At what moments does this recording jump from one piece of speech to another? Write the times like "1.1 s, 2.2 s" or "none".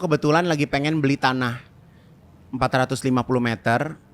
none